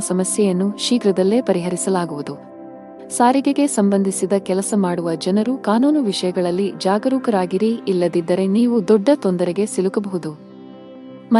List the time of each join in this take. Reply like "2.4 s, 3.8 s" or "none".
2.5 s